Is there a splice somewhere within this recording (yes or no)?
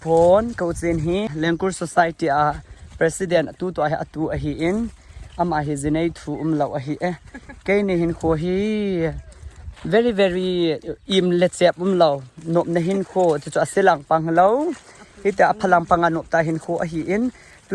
yes